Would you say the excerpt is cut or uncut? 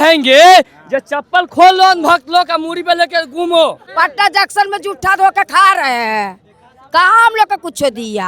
cut